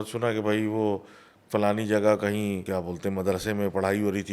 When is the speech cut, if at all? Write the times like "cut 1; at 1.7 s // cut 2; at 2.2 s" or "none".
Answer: cut 1; at 2.6 s